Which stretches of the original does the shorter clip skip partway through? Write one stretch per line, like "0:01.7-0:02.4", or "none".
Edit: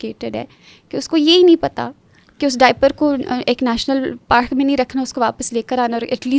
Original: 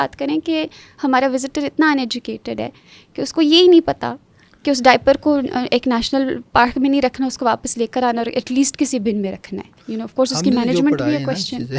none

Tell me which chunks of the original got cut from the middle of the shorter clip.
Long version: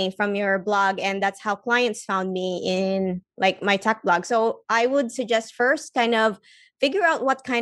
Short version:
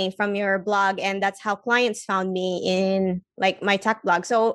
none

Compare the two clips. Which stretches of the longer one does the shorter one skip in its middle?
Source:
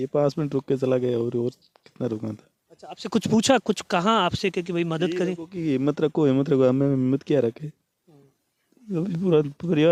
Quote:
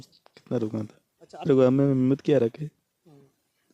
0:02.9-0:06.5

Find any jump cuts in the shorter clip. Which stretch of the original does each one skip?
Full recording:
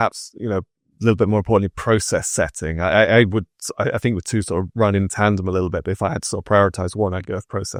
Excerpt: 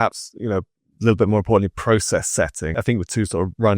0:02.8-0:03.9

